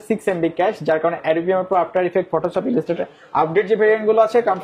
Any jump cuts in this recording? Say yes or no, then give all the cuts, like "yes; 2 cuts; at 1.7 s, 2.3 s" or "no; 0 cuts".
no; 0 cuts